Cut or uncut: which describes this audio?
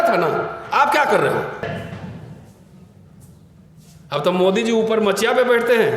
cut